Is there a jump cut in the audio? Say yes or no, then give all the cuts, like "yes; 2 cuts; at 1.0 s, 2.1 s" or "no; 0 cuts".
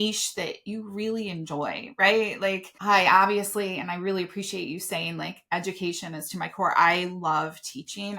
yes; 1 cut; at 2.7 s